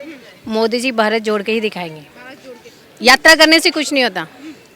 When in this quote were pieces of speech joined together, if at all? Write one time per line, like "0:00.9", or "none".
none